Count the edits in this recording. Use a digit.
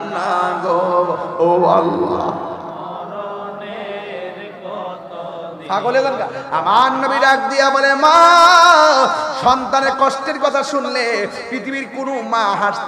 1